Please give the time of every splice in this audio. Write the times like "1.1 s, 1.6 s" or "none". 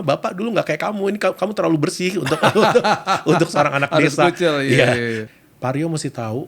5.2 s